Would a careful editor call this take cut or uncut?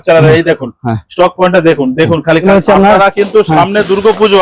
cut